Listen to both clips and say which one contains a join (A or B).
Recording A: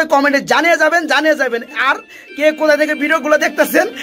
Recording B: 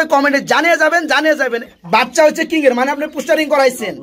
B